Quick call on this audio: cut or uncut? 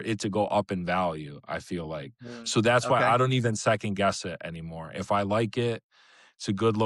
uncut